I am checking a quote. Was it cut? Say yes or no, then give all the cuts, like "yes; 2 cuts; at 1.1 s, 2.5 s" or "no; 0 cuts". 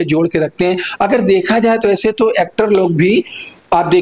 no; 0 cuts